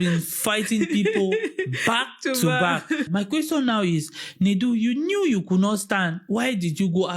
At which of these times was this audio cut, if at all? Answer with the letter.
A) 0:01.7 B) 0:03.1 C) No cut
B